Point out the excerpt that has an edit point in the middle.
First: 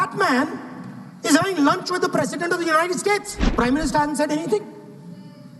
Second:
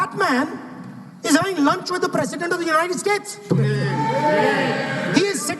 first; 1 cut; at 3.3 s

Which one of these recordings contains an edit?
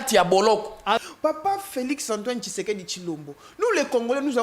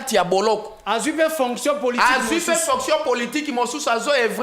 first; 1 cut; at 1.0 s

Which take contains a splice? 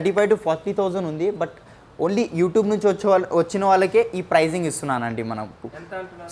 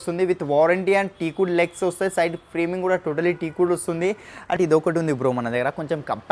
second; 1 cut; at 4.6 s

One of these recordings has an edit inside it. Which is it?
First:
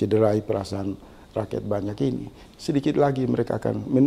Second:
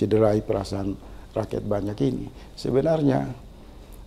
first; 1 cut; at 2.5 s

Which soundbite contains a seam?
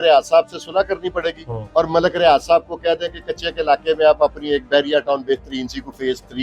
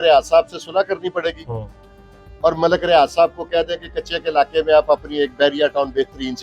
first; 1 cut; at 1.5 s

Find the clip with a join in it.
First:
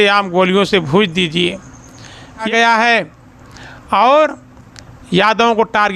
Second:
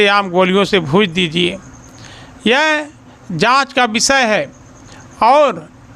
first; 1 cut; at 2.5 s

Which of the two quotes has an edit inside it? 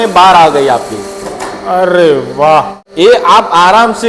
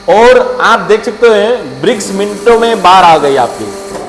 first; 1 cut; at 2.8 s

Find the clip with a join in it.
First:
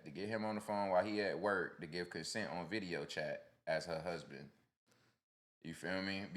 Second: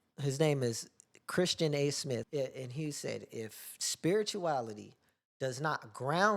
second; 1 cut; at 2.3 s

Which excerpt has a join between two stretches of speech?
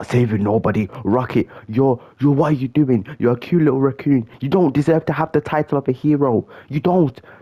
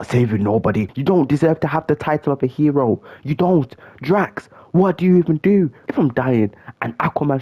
second; 2 cuts; at 0.9 s, 5.8 s

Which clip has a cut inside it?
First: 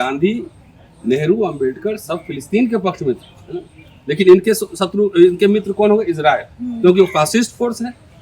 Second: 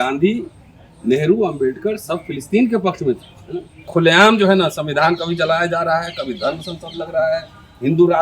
second; 1 cut; at 3.8 s

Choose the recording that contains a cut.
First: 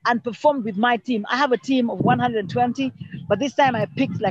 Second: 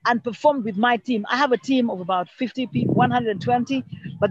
first; 1 cut; at 2.0 s

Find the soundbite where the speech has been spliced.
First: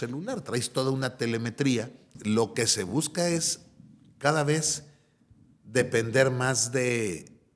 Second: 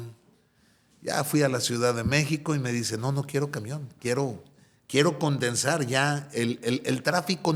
first; 1 cut; at 2.1 s

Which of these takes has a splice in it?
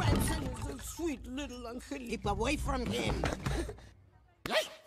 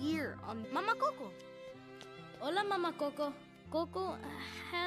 second; 1 cut; at 3.5 s

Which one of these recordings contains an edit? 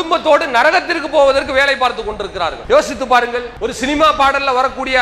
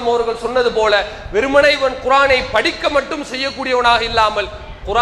first; 2 cuts; at 2.6 s, 3.5 s

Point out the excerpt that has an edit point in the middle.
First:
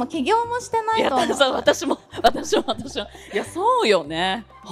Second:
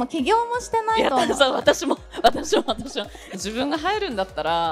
second; 1 cut; at 3.3 s

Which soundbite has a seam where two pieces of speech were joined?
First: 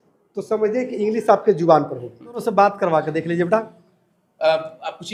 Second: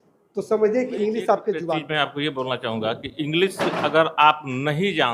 second; 1 cut; at 1.7 s

